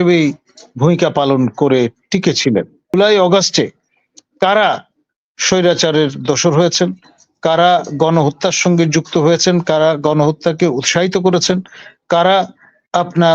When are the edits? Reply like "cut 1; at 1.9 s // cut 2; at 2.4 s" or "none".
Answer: cut 1; at 2.9 s